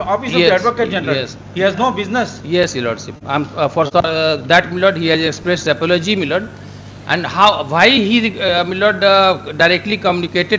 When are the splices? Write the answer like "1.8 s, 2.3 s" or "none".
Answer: none